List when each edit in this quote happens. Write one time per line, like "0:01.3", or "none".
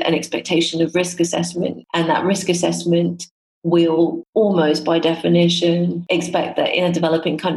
0:01.8
0:04.2
0:06.0